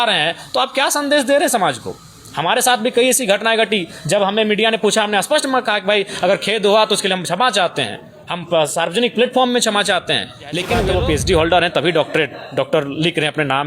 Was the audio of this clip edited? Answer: yes; 1 cut; at 10.8 s

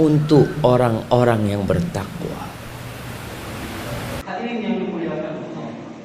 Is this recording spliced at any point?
yes; 1 cut; at 4.2 s

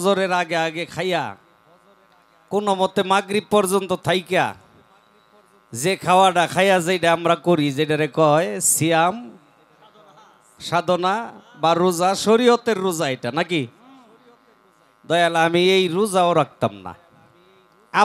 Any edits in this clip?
no; 0 cuts

